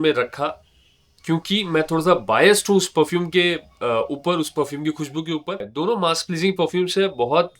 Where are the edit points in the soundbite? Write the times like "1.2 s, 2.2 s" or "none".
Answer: 5.7 s